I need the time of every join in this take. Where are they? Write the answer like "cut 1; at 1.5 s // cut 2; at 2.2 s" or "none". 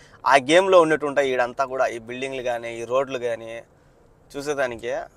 none

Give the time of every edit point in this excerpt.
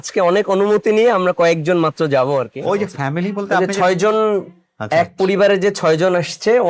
cut 1; at 2.5 s

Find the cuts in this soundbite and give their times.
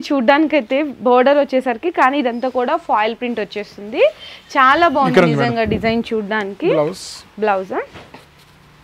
none

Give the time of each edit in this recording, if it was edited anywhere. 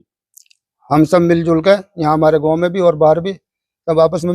none

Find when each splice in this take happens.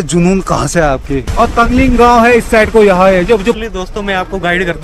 cut 1; at 1.3 s // cut 2; at 3.6 s

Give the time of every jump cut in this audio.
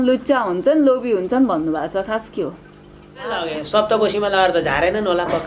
cut 1; at 3.4 s

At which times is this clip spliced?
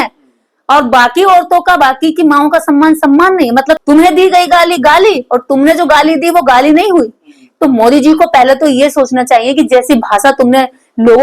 cut 1; at 3.8 s

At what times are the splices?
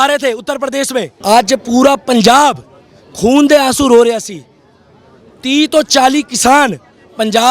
cut 1; at 1.1 s

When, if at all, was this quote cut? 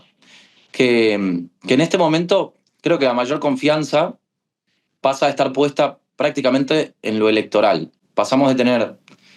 none

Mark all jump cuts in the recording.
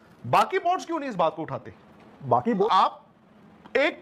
cut 1; at 2.7 s

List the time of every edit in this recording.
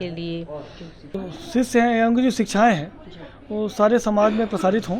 cut 1; at 1.2 s

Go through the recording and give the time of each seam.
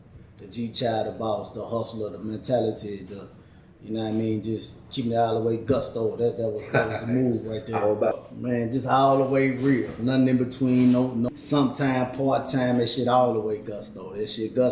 cut 1; at 8.2 s // cut 2; at 11.3 s

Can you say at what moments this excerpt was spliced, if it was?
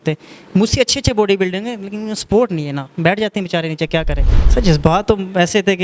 cut 1; at 4.3 s

